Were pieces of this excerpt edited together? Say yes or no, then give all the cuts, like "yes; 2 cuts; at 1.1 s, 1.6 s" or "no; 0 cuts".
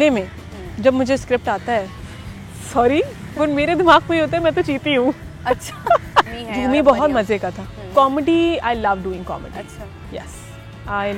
no; 0 cuts